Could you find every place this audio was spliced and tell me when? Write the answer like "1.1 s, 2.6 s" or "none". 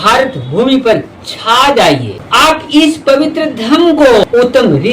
1.8 s, 4.2 s